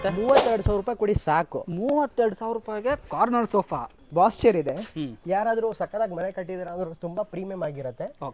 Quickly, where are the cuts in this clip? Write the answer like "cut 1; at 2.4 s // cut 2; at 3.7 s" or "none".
cut 1; at 3.9 s